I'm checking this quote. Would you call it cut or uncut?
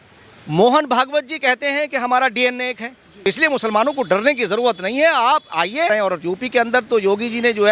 cut